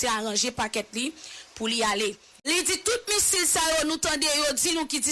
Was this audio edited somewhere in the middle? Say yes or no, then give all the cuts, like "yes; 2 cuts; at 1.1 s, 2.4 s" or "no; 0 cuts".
yes; 1 cut; at 2.5 s